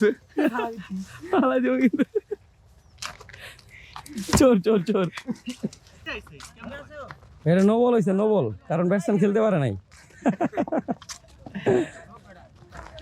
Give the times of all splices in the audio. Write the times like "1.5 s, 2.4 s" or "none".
6.0 s